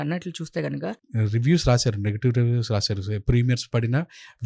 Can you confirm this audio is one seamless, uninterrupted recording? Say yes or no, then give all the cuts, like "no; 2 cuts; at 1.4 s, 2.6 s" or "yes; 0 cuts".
no; 1 cut; at 0.9 s